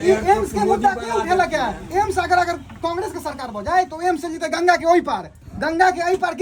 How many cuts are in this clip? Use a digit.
0